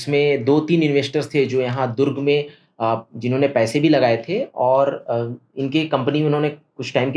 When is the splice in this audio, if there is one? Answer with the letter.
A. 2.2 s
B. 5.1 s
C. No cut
C